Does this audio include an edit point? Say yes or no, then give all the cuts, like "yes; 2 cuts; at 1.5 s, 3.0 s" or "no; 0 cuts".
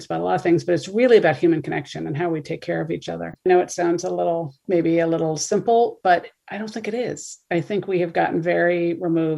yes; 1 cut; at 3.5 s